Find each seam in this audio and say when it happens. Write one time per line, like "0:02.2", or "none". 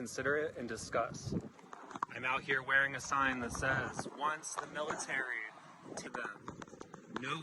0:06.1